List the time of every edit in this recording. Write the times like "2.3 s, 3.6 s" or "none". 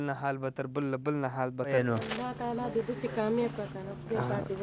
1.7 s